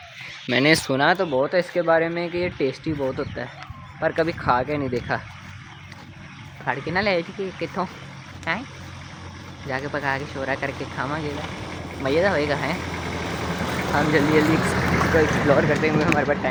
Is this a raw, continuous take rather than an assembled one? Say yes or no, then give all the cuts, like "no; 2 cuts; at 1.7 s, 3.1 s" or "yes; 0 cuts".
yes; 0 cuts